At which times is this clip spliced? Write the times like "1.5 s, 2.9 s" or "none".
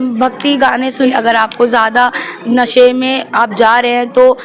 1.1 s